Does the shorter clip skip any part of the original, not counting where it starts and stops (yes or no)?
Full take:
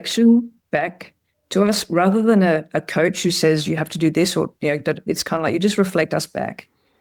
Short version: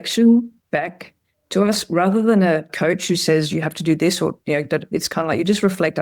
yes